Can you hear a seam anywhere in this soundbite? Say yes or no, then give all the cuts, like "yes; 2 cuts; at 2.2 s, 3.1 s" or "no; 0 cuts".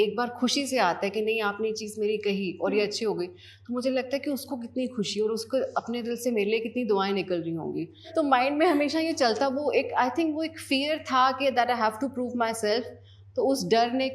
yes; 1 cut; at 8.0 s